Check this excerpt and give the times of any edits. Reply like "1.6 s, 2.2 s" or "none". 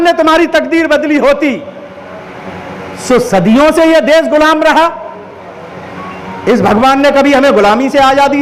none